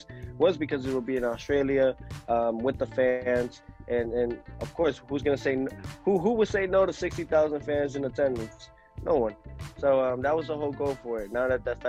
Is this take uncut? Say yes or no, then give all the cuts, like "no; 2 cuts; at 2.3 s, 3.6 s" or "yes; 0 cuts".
yes; 0 cuts